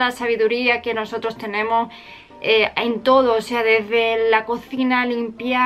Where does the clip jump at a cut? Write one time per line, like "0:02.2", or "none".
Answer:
none